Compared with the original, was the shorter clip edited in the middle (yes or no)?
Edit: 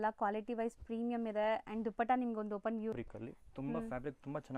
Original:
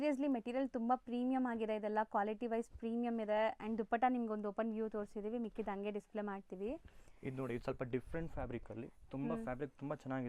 yes